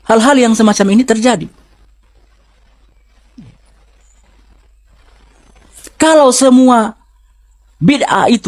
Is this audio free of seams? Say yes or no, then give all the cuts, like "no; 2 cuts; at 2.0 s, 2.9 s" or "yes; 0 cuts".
yes; 0 cuts